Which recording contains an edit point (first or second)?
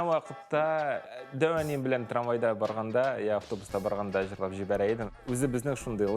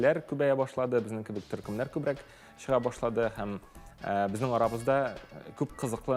first